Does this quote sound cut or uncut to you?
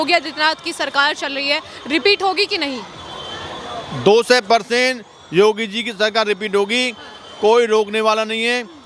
uncut